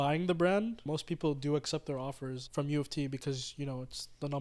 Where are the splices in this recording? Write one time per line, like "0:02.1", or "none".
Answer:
0:00.8
0:02.4